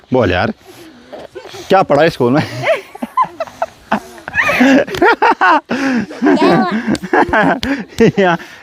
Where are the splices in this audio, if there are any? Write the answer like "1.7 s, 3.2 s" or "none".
none